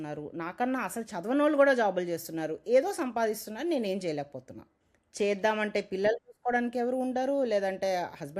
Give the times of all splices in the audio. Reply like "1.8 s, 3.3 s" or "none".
none